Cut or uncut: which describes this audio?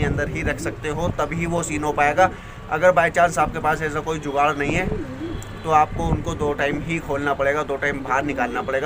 uncut